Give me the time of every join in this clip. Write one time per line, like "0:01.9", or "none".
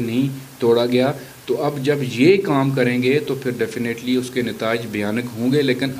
none

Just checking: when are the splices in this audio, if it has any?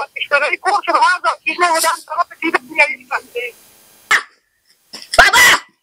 0:04.1

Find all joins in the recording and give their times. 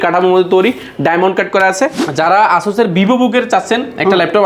0:02.0

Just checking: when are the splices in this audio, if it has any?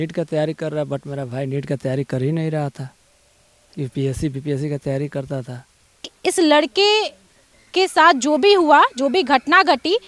0:06.1

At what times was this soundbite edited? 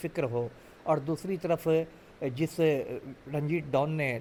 none

